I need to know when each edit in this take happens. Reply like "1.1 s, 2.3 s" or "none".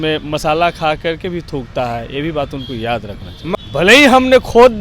3.6 s